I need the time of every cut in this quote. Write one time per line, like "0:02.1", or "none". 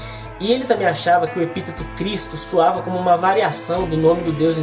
0:03.2